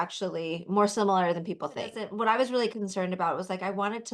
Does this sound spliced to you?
yes; 1 cut; at 2.0 s

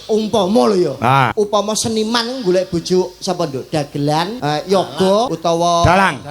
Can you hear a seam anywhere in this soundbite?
yes; 3 cuts; at 1.3 s, 4.3 s, 5.3 s

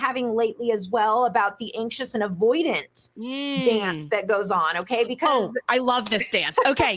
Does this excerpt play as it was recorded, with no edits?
yes; 0 cuts

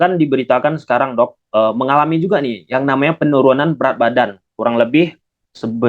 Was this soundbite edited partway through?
no; 0 cuts

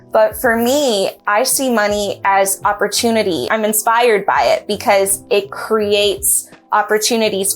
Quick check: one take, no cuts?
no; 1 cut; at 3.5 s

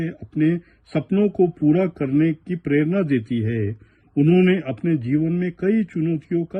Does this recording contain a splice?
no; 0 cuts

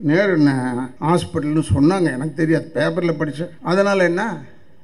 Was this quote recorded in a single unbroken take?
no; 2 cuts; at 0.9 s, 3.5 s

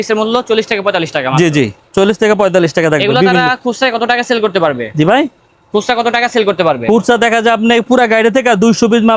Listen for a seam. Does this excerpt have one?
no; 0 cuts

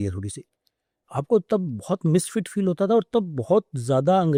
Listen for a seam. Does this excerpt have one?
no; 0 cuts

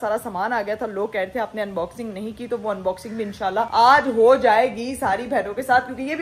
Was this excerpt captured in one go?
yes; 0 cuts

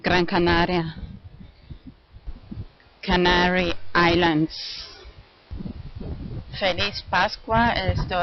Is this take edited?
yes; 1 cut; at 6.5 s

